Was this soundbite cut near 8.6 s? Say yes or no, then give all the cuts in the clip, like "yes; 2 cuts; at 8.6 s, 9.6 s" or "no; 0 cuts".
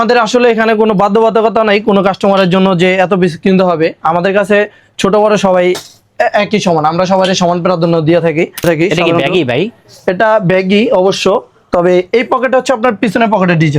yes; 1 cut; at 8.6 s